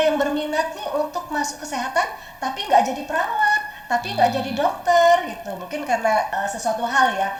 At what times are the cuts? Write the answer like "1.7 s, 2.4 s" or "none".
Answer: none

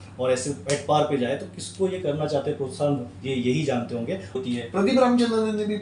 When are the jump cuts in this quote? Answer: 4.3 s

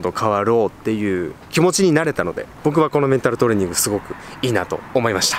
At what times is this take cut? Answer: none

